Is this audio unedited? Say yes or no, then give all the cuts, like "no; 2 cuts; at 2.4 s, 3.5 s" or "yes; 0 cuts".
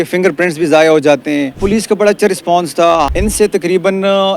no; 2 cuts; at 1.6 s, 3.1 s